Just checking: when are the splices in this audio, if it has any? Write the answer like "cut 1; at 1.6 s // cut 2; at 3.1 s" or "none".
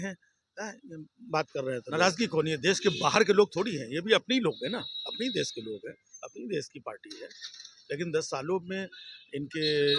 cut 1; at 1.9 s

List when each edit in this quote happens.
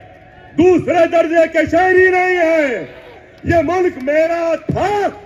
none

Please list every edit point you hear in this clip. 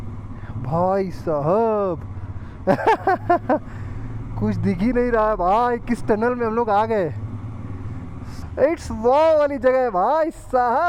cut 1; at 8.4 s

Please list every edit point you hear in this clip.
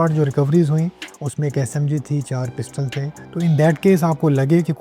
cut 1; at 3.2 s

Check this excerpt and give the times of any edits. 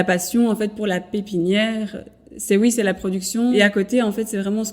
cut 1; at 3.5 s

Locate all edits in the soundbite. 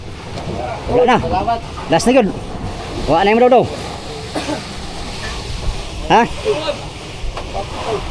cut 1; at 5.1 s

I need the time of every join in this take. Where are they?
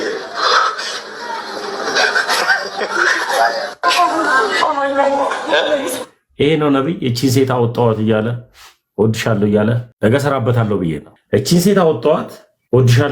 cut 1; at 9.9 s // cut 2; at 11.1 s

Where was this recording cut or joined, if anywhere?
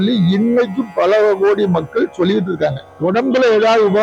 cut 1; at 2.9 s

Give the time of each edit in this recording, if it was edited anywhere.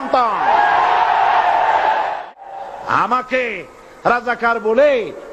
cut 1; at 2.2 s

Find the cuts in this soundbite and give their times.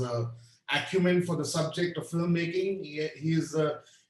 none

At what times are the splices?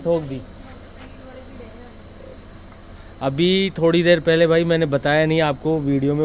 none

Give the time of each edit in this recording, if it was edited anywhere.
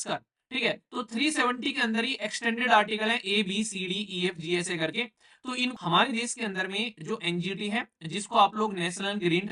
cut 1; at 5.7 s

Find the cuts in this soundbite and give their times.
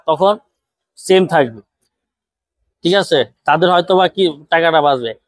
none

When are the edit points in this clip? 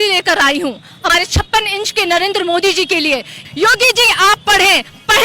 cut 1; at 1.1 s // cut 2; at 3.4 s

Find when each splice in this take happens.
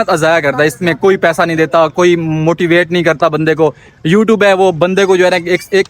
none

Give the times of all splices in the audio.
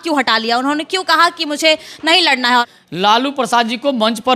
cut 1; at 2.7 s

